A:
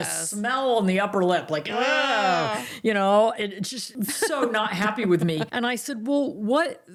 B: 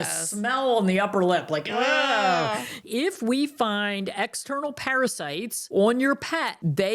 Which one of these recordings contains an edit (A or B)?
B